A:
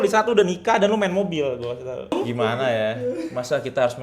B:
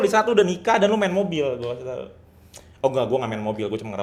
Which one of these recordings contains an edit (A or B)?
A